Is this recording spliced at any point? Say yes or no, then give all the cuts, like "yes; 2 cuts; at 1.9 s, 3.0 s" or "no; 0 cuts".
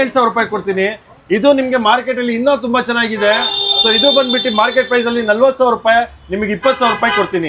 no; 0 cuts